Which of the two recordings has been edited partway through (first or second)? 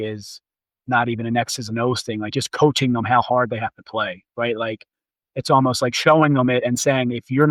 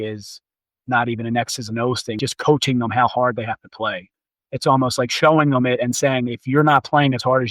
second